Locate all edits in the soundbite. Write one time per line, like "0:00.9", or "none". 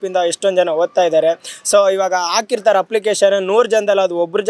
none